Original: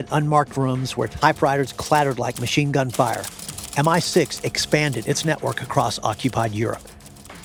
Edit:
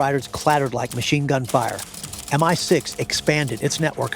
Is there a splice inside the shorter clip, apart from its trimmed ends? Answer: no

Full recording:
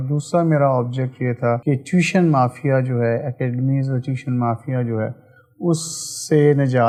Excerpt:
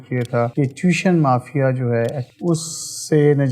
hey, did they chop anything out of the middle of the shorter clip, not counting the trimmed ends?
yes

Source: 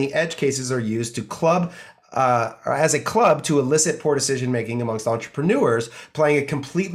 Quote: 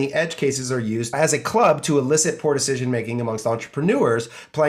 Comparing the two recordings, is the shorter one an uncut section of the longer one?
no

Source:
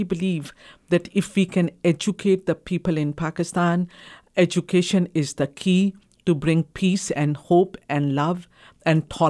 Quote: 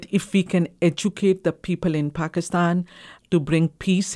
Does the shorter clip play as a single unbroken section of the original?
no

